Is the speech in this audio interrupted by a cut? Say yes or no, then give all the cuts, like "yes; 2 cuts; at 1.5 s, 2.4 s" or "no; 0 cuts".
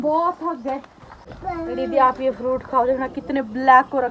yes; 1 cut; at 1.3 s